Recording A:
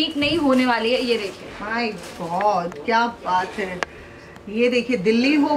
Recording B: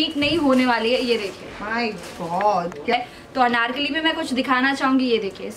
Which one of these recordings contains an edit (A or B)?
B